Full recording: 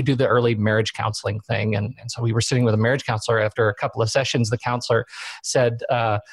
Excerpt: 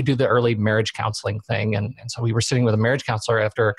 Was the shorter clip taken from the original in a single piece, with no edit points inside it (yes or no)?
yes